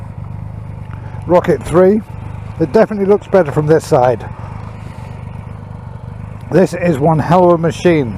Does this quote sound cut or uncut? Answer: uncut